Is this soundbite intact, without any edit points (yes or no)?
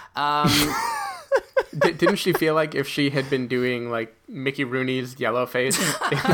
no